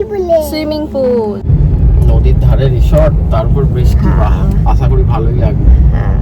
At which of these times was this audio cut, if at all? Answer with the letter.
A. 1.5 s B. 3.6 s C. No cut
A